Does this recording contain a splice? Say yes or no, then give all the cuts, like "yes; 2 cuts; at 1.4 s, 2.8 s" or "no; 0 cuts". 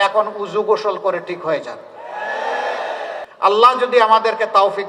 yes; 1 cut; at 3.3 s